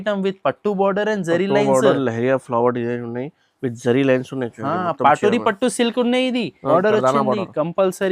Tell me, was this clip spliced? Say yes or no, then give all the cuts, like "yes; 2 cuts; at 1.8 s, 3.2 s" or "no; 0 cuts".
yes; 1 cut; at 6.7 s